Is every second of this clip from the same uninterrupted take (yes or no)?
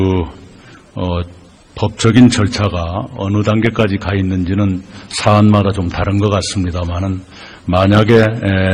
yes